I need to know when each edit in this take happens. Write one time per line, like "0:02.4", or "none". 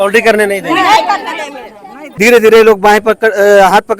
0:02.0

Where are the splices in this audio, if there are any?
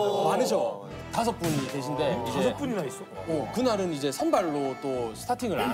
none

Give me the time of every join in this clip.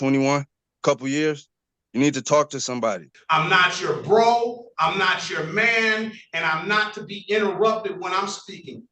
0:03.1

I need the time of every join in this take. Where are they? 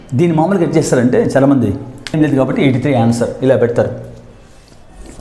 0:02.2

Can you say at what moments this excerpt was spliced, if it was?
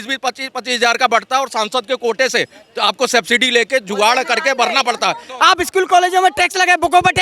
0:05.3

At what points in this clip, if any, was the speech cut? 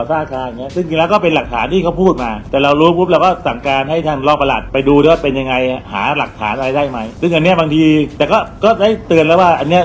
0:02.3
0:04.6
0:07.1
0:08.1

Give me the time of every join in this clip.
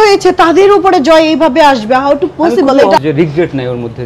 0:03.0

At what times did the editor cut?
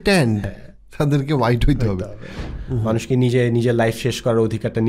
0:02.5

